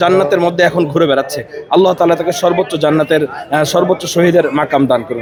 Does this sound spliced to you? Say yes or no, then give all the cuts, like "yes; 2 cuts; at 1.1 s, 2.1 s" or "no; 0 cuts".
no; 0 cuts